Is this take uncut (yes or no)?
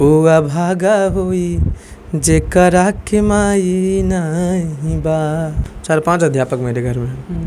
no